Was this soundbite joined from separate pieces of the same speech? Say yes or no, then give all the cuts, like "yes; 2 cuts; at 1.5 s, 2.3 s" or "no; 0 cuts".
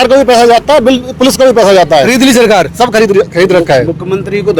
no; 0 cuts